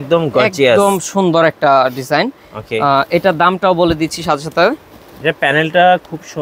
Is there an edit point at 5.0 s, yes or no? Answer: no